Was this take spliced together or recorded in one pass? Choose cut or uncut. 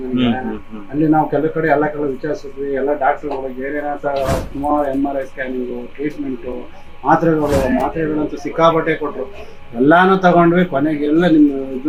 uncut